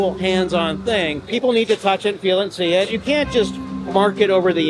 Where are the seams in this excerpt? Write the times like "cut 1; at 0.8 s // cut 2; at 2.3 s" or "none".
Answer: cut 1; at 1.3 s // cut 2; at 2.9 s